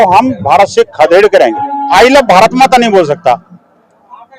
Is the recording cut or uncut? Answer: cut